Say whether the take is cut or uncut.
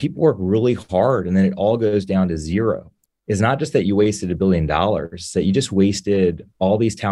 cut